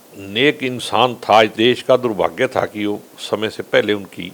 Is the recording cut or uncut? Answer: cut